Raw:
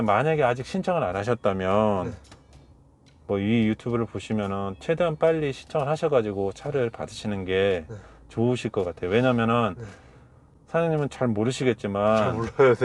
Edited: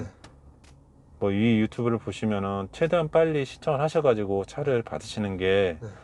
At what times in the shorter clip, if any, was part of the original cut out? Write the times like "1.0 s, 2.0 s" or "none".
none